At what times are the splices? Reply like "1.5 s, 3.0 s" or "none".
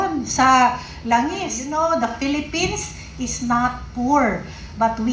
1.6 s

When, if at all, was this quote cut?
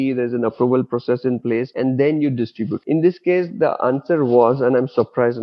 1.7 s, 2.8 s

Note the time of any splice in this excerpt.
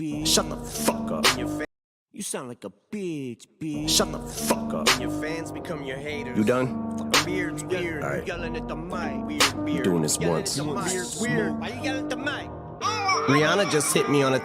1.0 s, 1.7 s, 4.7 s

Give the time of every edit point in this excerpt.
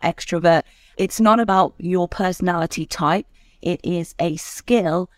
0.9 s

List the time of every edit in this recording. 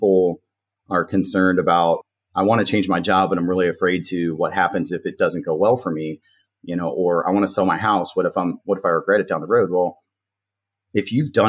2.0 s

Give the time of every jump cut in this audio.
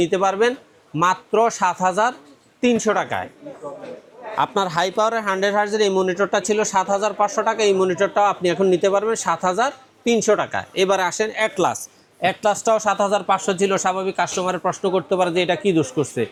none

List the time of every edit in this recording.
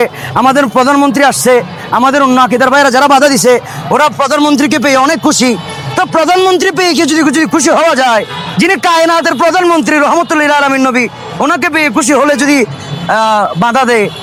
none

